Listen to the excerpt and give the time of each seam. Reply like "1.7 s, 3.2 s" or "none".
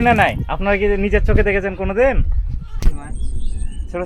2.7 s